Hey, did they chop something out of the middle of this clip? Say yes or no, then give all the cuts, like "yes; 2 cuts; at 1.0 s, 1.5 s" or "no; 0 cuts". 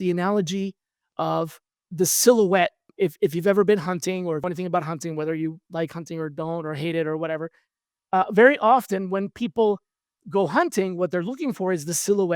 yes; 2 cuts; at 1.8 s, 2.8 s